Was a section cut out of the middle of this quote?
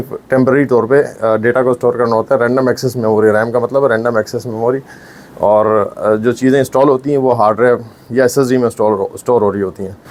no; 0 cuts

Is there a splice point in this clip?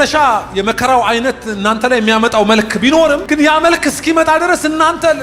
yes; 1 cut; at 3.2 s

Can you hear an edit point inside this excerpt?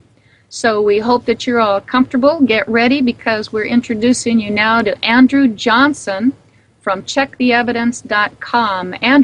yes; 1 cut; at 7.0 s

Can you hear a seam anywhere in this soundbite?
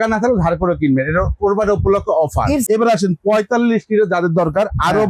yes; 1 cut; at 2.6 s

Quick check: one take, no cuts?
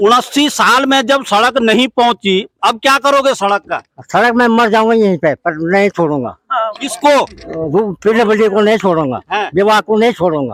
yes; 0 cuts

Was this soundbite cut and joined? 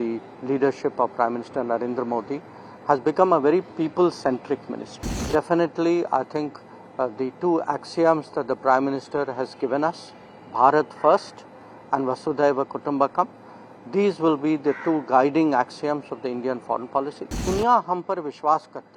yes; 2 cuts; at 5.2 s, 17.4 s

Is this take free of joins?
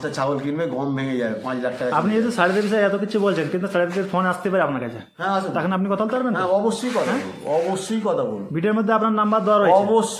yes; 0 cuts

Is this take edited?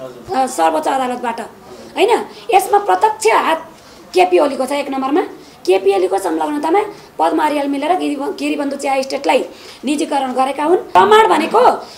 yes; 1 cut; at 10.9 s

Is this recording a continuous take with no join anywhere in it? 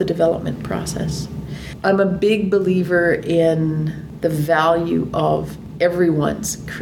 yes; 0 cuts

